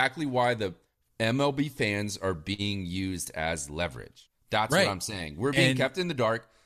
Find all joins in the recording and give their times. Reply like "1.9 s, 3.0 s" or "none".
none

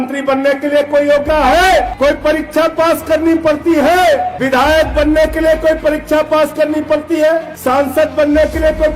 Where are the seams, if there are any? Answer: 1.2 s, 1.9 s, 4.3 s, 7.5 s

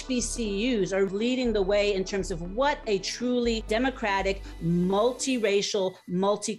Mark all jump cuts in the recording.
1.1 s, 3.6 s

